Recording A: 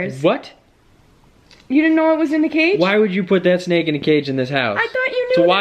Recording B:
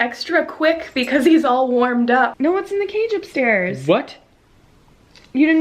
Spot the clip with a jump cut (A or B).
B